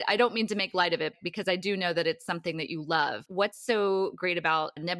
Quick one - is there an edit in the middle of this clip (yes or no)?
no